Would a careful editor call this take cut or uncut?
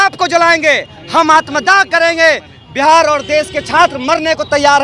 uncut